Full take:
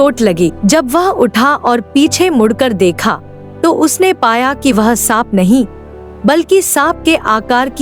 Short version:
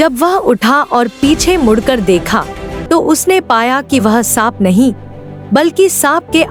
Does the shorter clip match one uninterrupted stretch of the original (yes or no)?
yes